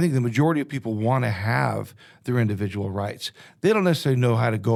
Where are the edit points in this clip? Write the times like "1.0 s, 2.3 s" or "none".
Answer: none